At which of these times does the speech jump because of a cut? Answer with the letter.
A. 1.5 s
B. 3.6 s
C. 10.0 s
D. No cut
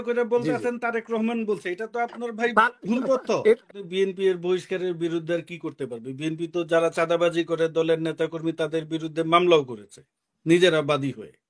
B